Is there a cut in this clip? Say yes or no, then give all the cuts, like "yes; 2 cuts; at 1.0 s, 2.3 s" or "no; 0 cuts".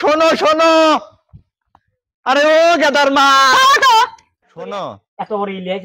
yes; 1 cut; at 4.6 s